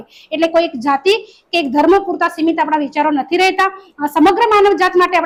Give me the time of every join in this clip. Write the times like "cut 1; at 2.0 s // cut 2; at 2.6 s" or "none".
none